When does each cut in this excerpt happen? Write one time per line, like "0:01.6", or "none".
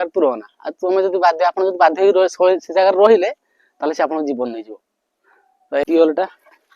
0:05.8